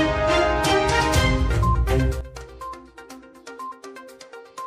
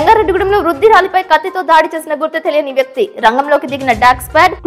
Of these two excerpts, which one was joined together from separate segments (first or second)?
first